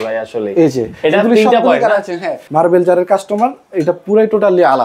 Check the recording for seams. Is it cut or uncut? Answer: cut